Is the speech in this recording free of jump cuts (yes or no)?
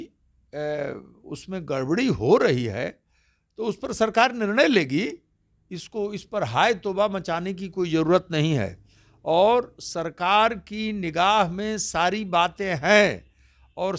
yes